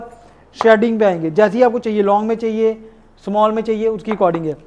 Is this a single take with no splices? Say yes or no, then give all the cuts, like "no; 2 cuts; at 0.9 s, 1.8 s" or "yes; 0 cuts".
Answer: yes; 0 cuts